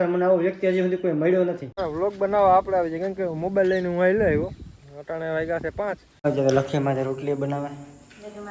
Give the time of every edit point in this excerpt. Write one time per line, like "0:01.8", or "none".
0:01.7
0:06.2